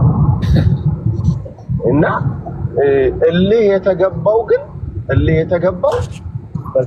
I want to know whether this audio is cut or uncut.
uncut